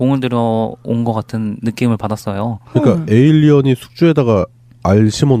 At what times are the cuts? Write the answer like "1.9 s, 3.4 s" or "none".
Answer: 3.5 s